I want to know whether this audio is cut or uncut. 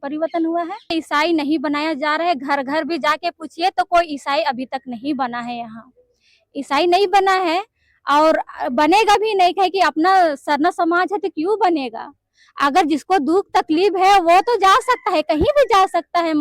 cut